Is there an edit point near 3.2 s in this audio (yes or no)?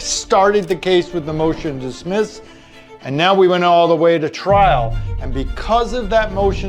no